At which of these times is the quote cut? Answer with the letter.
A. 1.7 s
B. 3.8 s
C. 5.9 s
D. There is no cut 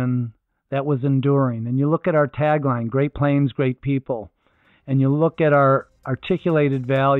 C